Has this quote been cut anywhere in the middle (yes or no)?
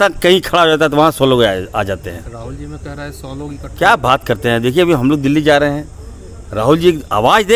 no